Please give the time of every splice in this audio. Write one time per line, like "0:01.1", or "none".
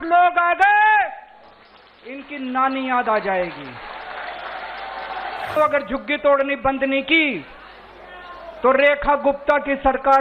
0:05.6